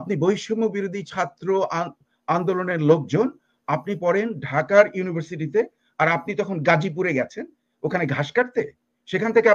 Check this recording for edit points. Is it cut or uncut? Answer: uncut